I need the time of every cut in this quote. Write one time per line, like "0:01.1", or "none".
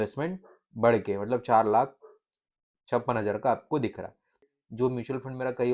0:04.4

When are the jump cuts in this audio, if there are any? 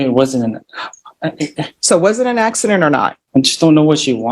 0:03.2

